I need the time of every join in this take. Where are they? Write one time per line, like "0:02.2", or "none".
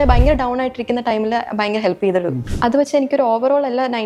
0:02.4